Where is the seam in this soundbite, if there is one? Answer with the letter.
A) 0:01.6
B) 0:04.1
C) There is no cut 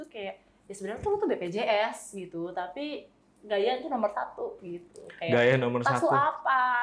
C